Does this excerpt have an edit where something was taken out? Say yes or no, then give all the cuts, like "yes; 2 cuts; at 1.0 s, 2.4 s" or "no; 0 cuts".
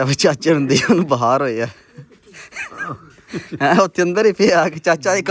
no; 0 cuts